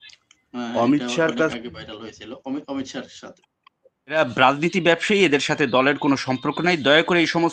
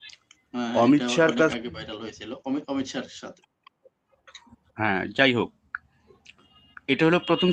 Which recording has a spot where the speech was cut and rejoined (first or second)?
first